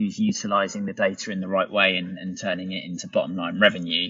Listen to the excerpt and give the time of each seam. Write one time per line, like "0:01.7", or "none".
none